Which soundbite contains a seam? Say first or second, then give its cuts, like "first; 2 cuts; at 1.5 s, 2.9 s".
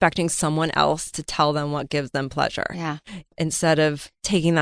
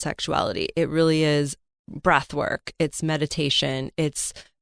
first; 1 cut; at 3.3 s